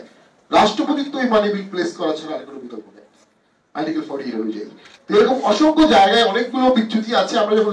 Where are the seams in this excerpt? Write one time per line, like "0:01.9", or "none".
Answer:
none

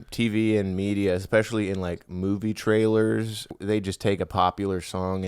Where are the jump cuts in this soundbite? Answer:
0:03.4

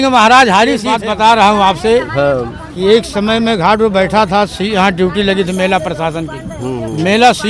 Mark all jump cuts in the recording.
0:00.9

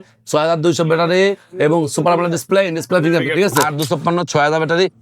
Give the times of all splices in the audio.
0:03.7

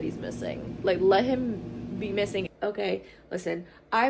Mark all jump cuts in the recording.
0:02.5

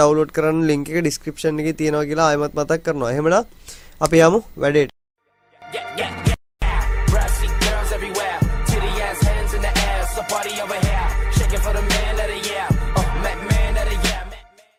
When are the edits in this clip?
none

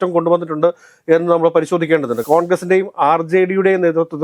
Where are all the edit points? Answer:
0:02.2

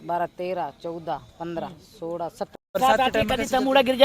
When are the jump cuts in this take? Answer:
0:02.7

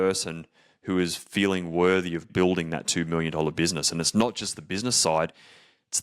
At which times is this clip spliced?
0:02.3

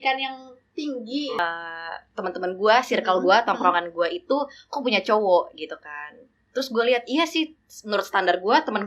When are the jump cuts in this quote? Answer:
0:01.4

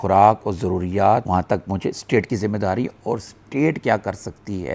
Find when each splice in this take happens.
none

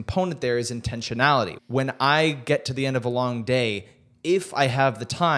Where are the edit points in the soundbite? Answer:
0:01.6

